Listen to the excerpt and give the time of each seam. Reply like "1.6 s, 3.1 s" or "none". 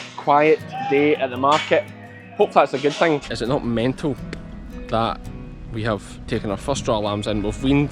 3.2 s